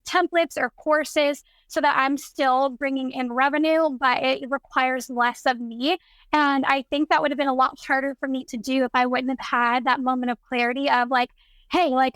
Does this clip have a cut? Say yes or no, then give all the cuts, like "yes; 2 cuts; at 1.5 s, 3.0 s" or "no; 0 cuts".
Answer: no; 0 cuts